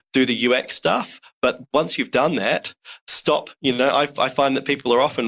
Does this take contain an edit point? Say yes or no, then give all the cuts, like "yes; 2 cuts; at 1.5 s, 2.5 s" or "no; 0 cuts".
no; 0 cuts